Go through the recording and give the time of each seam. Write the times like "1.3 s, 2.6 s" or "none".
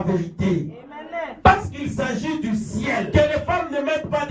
3.1 s